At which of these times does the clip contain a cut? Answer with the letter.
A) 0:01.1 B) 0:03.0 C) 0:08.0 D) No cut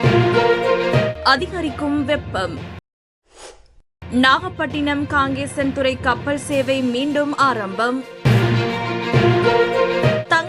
A